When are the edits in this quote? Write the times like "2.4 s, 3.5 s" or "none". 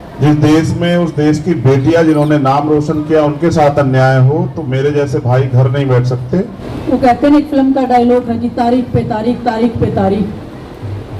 6.6 s